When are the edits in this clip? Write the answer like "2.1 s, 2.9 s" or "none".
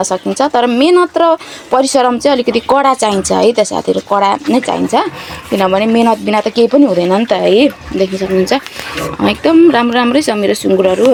none